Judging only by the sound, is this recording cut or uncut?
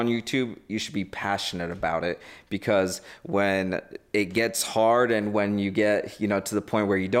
uncut